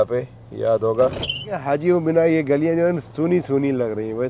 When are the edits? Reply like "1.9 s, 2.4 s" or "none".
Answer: 1.6 s